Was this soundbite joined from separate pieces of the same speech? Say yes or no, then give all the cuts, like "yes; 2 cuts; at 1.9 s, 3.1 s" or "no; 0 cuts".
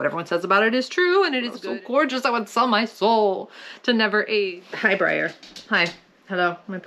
yes; 2 cuts; at 1.5 s, 4.6 s